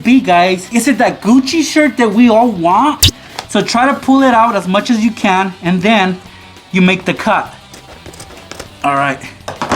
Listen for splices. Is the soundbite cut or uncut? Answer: cut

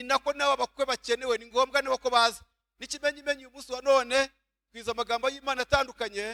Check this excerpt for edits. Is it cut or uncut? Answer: uncut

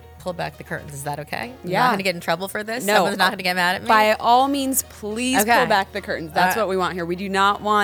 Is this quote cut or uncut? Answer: uncut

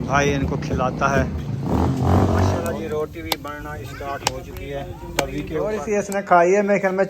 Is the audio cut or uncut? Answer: cut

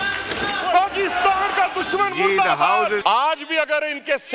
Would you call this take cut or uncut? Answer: cut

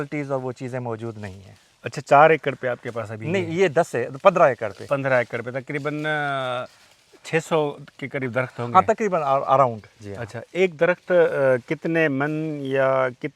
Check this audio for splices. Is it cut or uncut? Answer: uncut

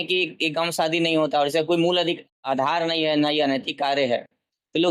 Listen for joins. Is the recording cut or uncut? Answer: uncut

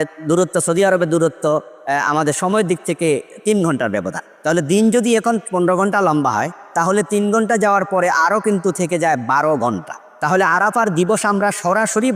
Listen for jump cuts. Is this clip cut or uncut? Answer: uncut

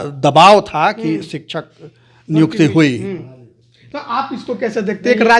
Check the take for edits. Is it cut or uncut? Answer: uncut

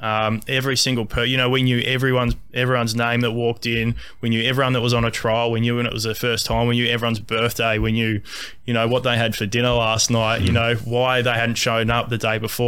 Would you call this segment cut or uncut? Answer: uncut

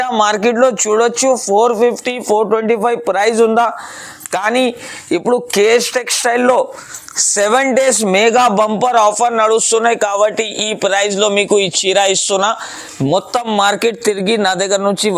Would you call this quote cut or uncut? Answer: uncut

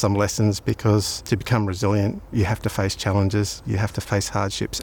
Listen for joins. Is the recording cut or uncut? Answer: cut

